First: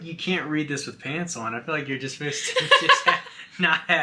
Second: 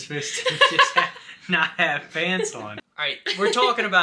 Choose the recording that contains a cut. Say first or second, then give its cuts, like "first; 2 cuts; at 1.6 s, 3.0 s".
second; 1 cut; at 2.8 s